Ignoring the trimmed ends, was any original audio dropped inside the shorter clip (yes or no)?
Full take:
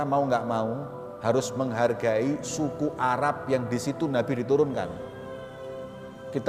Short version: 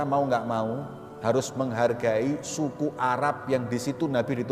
no